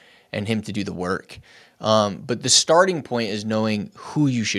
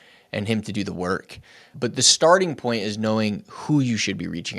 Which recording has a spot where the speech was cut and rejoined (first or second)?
second